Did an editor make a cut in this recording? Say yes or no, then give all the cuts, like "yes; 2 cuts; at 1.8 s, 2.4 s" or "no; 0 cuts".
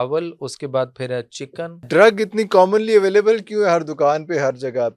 yes; 1 cut; at 1.8 s